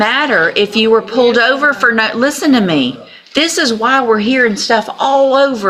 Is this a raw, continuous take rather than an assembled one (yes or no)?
yes